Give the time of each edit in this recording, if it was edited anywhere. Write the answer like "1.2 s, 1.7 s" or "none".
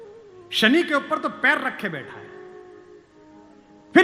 none